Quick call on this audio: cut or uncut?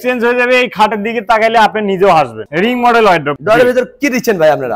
cut